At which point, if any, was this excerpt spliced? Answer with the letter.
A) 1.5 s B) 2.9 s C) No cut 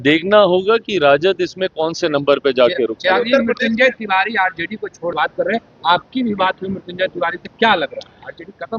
C